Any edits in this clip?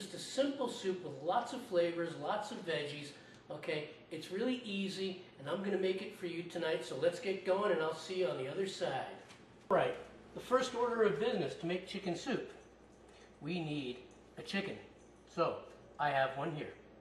yes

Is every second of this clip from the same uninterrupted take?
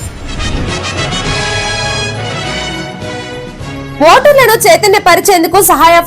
yes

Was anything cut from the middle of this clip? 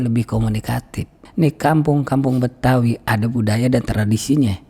yes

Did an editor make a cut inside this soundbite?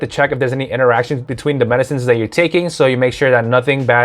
yes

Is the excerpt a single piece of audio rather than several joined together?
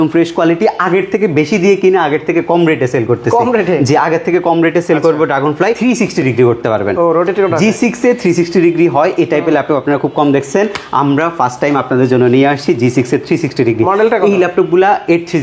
no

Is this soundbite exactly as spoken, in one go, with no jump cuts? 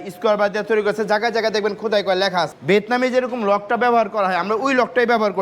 no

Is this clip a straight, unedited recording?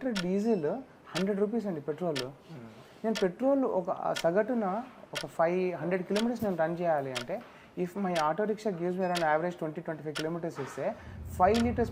yes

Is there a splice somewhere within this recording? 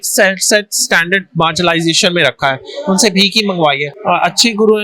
yes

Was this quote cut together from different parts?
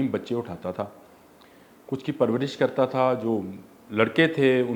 no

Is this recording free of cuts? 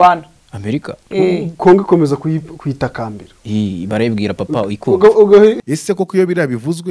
no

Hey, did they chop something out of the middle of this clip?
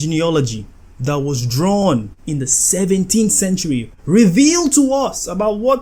no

